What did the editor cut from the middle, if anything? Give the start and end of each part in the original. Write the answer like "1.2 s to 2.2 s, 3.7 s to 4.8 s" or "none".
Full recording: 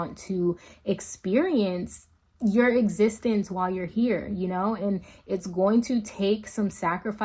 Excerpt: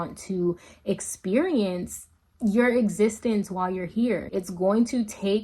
4.3 s to 5.2 s